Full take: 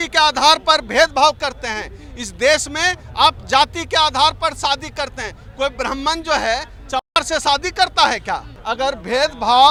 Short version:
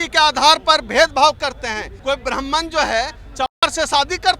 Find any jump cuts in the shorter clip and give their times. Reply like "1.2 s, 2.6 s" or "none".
1.9 s

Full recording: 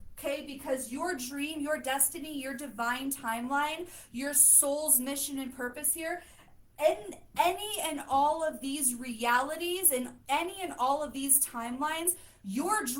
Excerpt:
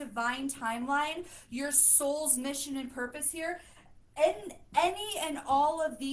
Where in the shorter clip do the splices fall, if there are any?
none

